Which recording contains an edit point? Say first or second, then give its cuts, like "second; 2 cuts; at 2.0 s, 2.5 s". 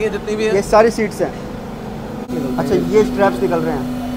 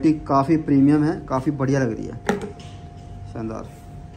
first; 1 cut; at 2.3 s